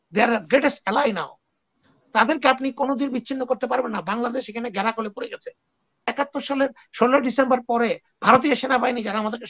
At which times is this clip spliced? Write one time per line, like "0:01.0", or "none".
0:06.1